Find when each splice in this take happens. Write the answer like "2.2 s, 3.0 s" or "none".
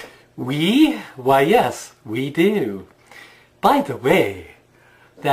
1.0 s